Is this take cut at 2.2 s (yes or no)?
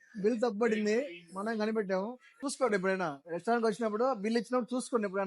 yes